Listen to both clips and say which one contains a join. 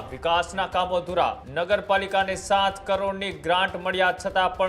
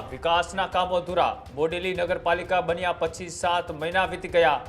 first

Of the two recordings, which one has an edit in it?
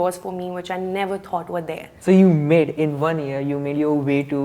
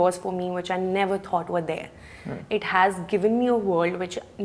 first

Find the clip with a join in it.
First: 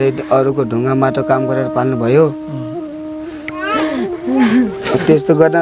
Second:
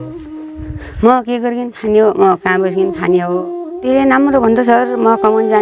second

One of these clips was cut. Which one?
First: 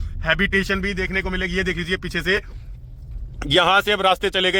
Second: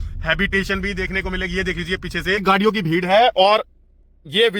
second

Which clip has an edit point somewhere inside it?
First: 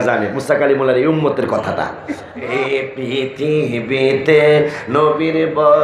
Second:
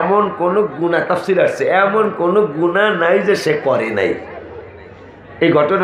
first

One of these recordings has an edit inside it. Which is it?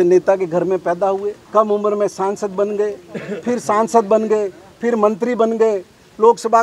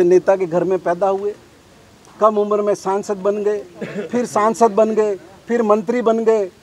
first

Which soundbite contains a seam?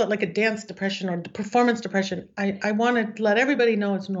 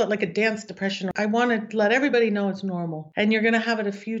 second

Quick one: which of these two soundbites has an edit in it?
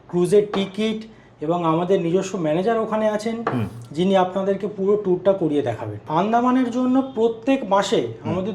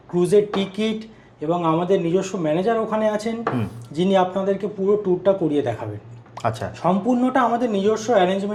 first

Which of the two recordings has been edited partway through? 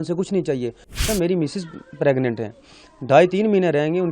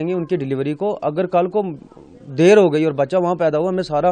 first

